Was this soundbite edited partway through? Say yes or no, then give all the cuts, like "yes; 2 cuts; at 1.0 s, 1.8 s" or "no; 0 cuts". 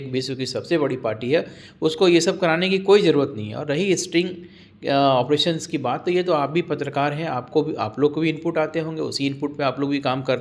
no; 0 cuts